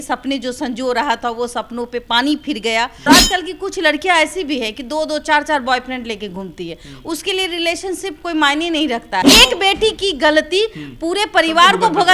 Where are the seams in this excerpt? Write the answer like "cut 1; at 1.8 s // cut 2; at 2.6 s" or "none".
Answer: cut 1; at 3.1 s // cut 2; at 9.3 s